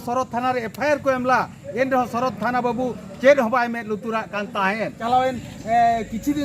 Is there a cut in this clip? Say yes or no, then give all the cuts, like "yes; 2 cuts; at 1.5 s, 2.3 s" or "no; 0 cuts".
yes; 1 cut; at 5.0 s